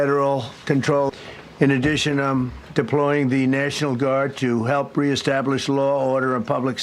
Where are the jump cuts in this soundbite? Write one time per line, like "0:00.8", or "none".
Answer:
0:01.1